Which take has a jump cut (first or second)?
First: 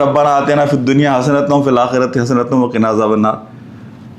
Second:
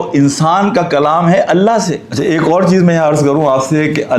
second